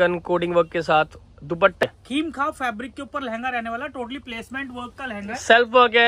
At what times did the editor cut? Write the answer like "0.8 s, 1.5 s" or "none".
1.8 s